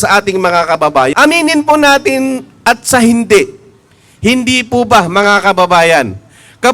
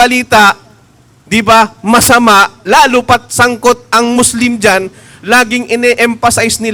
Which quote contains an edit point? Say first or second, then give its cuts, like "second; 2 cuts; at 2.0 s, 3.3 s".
first; 1 cut; at 1.1 s